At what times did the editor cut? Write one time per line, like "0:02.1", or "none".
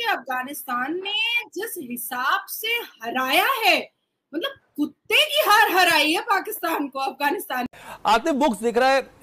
0:07.8